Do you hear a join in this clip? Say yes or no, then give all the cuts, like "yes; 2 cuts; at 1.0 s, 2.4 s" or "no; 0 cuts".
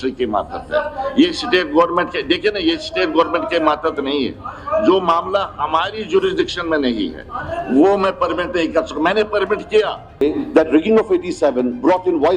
yes; 1 cut; at 10.2 s